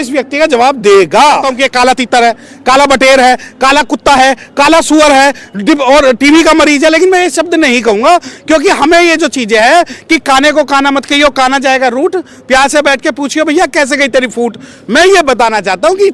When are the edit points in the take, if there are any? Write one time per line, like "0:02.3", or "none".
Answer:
0:01.5

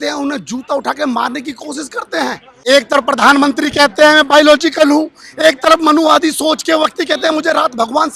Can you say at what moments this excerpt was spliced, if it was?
0:02.5

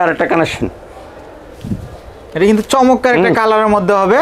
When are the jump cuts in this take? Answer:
none

